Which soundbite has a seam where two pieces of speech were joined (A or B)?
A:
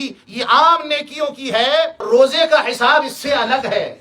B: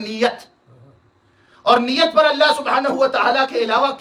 A